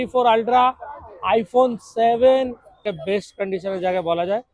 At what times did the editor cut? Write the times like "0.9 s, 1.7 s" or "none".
2.9 s